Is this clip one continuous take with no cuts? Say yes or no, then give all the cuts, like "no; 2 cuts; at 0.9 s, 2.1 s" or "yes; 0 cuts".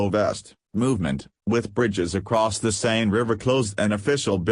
no; 1 cut; at 1.0 s